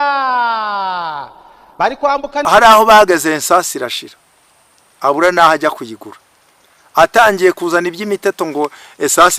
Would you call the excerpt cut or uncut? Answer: cut